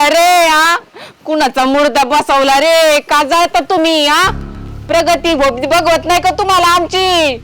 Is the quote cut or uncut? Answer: uncut